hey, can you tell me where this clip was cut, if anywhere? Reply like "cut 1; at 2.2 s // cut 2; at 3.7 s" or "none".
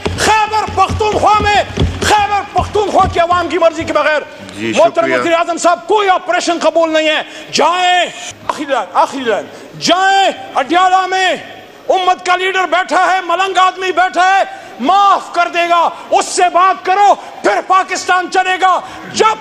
cut 1; at 8.2 s